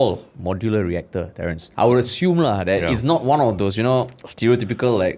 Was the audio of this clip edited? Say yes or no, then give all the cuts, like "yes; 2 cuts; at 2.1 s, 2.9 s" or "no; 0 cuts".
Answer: yes; 1 cut; at 1.7 s